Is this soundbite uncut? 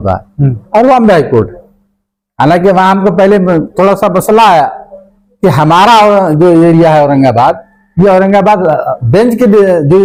yes; 0 cuts

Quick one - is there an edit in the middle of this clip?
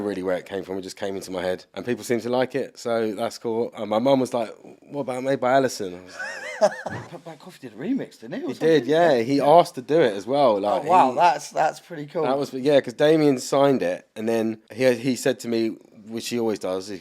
yes; 3 cuts; at 1.7 s, 7.0 s, 12.9 s

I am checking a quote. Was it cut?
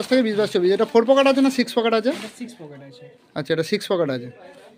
no; 0 cuts

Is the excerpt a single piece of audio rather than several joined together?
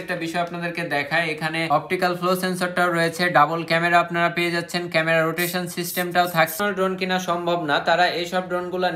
no; 2 cuts; at 1.7 s, 6.5 s

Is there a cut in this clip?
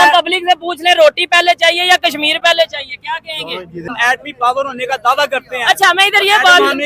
yes; 1 cut; at 3.9 s

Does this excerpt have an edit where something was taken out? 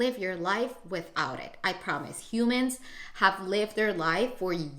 no; 0 cuts

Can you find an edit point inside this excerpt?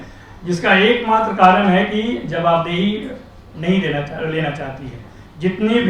no; 0 cuts

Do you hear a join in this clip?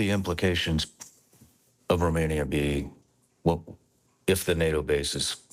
no; 0 cuts

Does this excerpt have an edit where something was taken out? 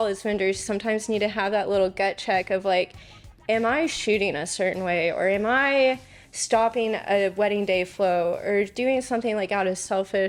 no; 0 cuts

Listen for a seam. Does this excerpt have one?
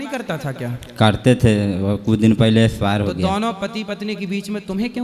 no; 0 cuts

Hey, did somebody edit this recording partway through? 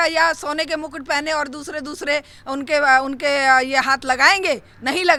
no; 0 cuts

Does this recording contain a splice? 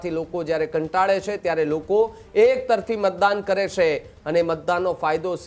no; 0 cuts

